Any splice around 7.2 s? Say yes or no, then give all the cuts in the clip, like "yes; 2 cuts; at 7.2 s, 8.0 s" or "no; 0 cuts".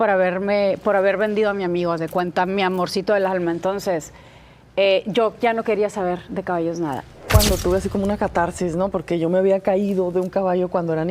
yes; 1 cut; at 7.2 s